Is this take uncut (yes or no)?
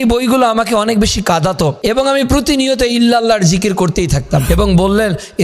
no